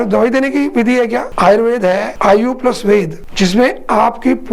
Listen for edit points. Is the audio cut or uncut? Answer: cut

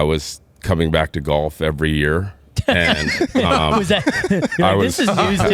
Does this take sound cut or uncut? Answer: uncut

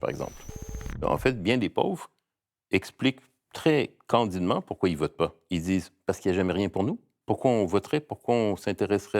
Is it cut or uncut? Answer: cut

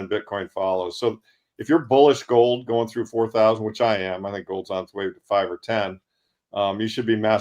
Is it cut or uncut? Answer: uncut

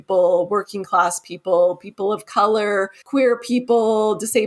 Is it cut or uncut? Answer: cut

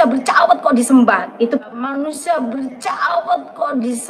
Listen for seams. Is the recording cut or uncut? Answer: uncut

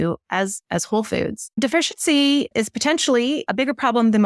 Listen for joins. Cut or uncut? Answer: cut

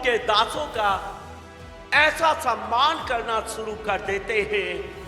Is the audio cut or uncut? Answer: uncut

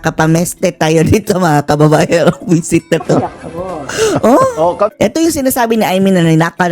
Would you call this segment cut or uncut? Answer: cut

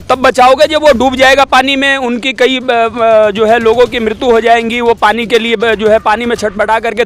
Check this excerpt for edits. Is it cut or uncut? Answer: uncut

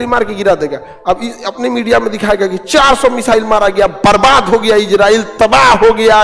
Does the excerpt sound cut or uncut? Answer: uncut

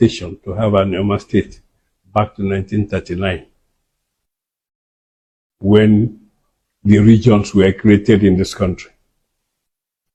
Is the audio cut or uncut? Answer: uncut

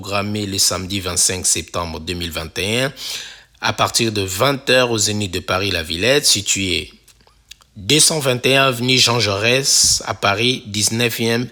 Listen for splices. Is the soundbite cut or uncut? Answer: uncut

